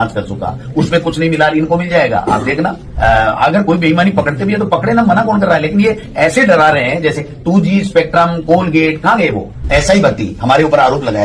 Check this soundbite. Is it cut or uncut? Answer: cut